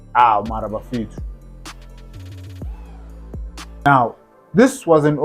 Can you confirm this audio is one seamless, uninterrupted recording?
no; 1 cut; at 3.9 s

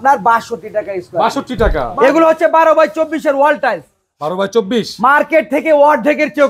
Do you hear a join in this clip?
yes; 1 cut; at 1.8 s

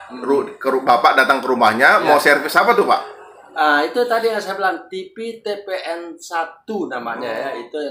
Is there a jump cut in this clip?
no; 0 cuts

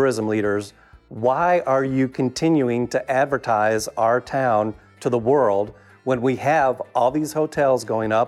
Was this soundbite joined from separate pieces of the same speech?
no; 0 cuts

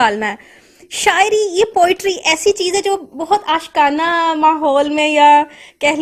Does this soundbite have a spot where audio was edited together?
no; 0 cuts

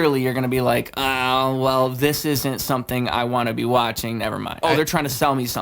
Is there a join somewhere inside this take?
yes; 1 cut; at 4.6 s

